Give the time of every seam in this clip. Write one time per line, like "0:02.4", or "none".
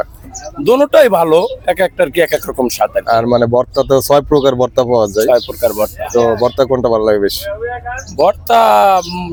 none